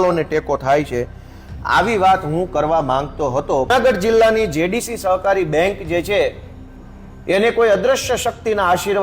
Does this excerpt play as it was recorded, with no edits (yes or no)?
no